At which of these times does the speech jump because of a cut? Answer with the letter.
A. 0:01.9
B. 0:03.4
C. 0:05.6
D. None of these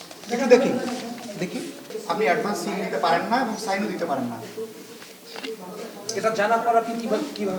A